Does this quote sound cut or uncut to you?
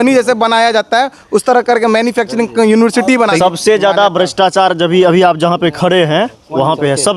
cut